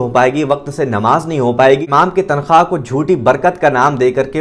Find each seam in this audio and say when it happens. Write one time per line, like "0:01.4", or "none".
0:01.8